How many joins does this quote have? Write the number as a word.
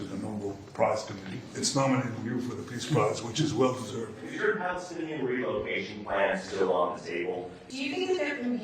three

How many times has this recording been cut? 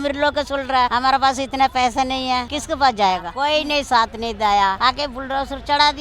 four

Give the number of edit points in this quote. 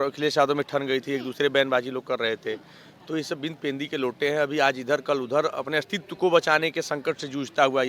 zero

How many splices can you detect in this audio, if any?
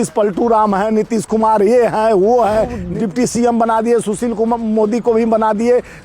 one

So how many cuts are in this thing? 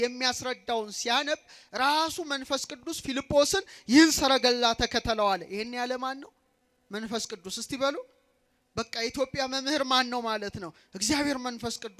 zero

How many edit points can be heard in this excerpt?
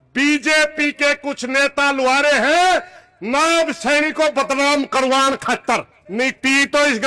one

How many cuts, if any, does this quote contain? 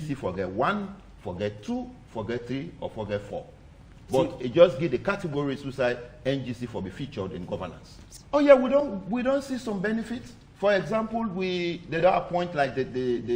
one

